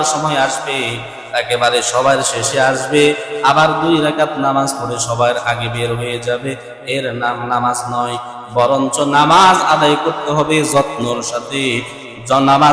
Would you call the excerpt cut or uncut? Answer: uncut